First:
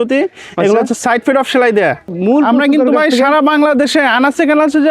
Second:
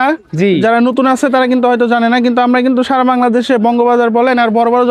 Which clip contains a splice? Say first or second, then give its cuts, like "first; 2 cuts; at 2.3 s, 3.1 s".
first; 1 cut; at 2.1 s